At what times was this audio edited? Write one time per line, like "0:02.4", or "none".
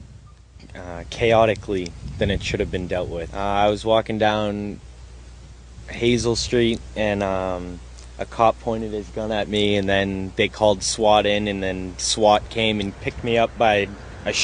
0:01.9